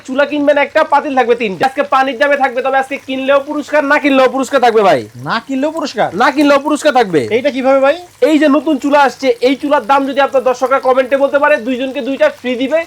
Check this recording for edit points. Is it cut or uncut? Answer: cut